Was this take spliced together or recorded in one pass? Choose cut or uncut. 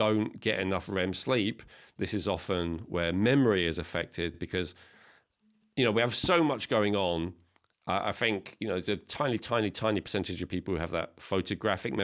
uncut